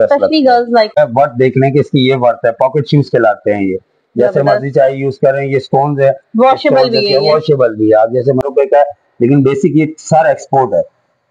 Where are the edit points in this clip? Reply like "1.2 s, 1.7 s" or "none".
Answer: 0.9 s, 8.4 s